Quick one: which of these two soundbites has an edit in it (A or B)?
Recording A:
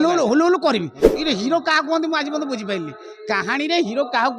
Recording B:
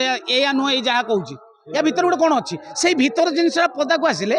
A